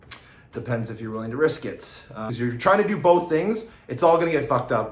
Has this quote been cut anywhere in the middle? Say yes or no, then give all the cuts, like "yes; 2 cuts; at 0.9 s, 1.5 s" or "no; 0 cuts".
yes; 1 cut; at 2.2 s